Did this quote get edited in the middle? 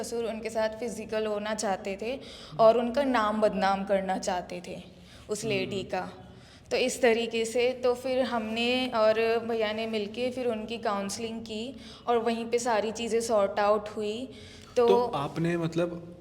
no; 0 cuts

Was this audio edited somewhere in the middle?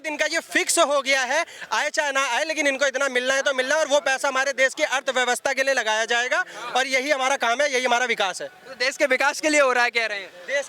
no; 0 cuts

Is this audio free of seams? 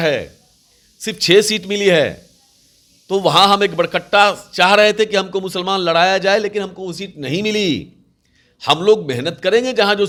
yes; 0 cuts

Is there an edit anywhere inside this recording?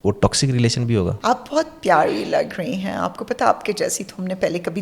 yes; 1 cut; at 1.2 s

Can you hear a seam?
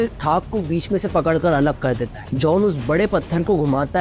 yes; 1 cut; at 2.2 s

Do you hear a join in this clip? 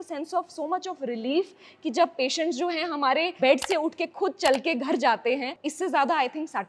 yes; 2 cuts; at 3.4 s, 5.6 s

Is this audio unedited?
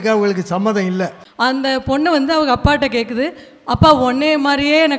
no; 1 cut; at 1.2 s

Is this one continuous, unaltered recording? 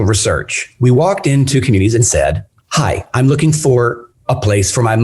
no; 1 cut; at 2.5 s

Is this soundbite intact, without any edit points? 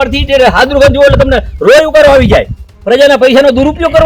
yes; 0 cuts

